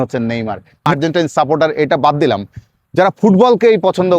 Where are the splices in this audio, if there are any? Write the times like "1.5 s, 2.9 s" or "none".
0.9 s